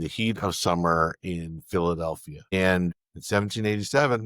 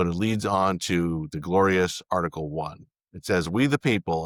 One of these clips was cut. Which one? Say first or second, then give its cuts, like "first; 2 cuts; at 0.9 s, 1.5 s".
first; 2 cuts; at 2.5 s, 3.1 s